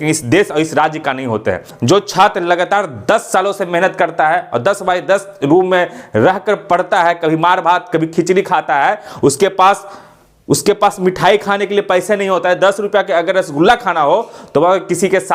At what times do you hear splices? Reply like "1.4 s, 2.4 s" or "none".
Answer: none